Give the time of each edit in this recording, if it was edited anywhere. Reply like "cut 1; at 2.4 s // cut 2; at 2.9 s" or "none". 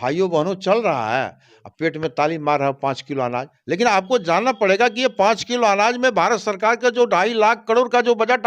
none